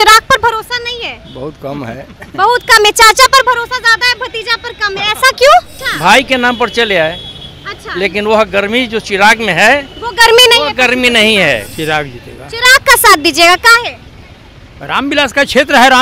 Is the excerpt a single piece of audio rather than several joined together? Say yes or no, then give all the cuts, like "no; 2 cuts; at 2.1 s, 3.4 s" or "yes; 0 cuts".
no; 2 cuts; at 5.8 s, 11.7 s